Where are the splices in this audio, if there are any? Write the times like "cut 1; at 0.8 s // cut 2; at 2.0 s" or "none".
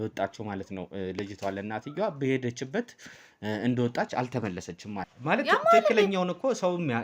cut 1; at 5.1 s